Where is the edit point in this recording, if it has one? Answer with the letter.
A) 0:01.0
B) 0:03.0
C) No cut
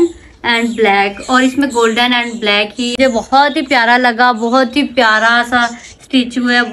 B